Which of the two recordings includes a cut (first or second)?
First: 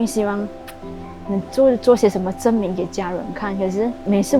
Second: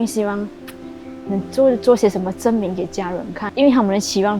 second